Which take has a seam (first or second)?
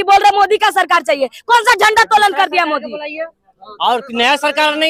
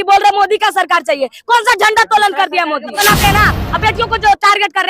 second